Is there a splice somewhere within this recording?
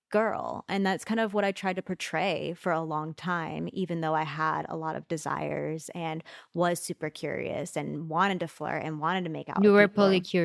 yes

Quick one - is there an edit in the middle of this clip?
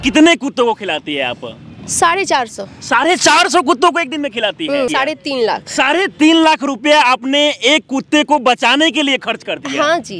yes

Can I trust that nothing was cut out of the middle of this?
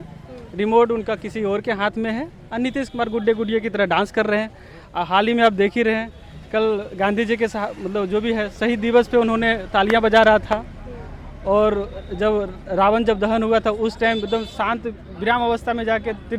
yes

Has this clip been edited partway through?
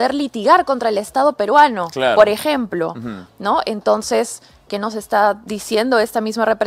no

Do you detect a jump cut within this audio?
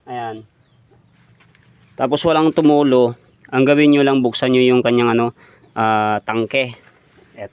no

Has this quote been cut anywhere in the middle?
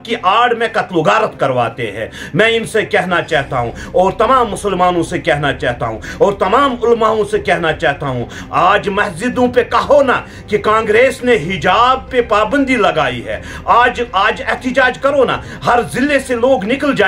no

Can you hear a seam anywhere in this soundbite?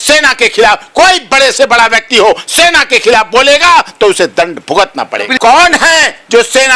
yes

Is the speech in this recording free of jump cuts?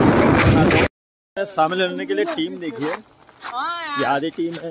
no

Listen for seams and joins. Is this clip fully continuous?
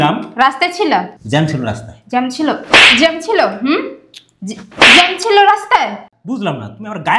no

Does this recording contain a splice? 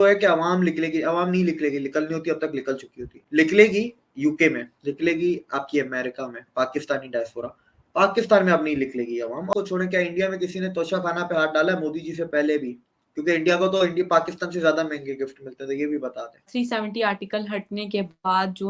yes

